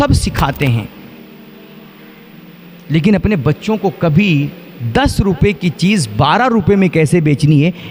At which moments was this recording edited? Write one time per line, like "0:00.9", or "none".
none